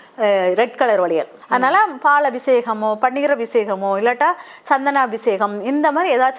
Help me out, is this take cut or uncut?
cut